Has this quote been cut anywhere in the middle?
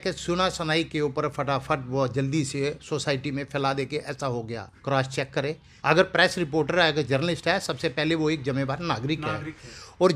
yes; 2 cuts; at 4.7 s, 5.7 s

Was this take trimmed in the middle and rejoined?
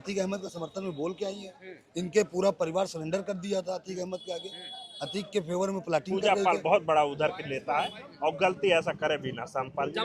yes; 1 cut; at 6.1 s

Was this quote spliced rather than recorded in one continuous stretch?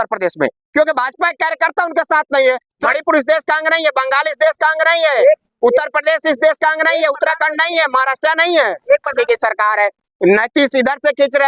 yes; 2 cuts; at 2.8 s, 9.1 s

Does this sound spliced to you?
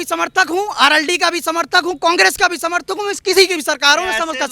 no; 0 cuts

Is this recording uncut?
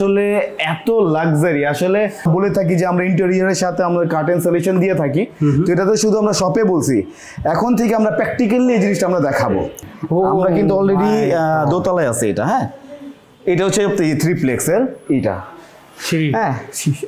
no; 2 cuts; at 2.2 s, 9.9 s

